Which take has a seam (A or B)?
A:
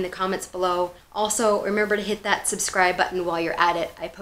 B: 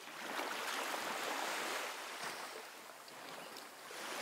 A